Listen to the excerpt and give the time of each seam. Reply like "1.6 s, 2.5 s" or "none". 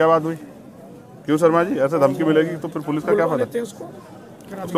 none

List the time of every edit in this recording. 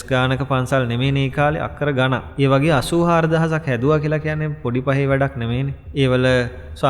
2.3 s, 5.8 s

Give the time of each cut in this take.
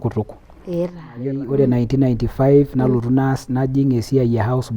1.2 s

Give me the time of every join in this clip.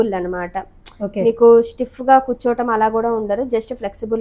none

